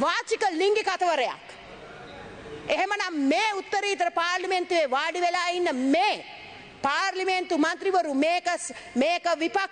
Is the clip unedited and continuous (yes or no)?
yes